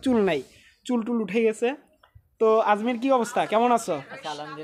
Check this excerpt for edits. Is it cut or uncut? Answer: uncut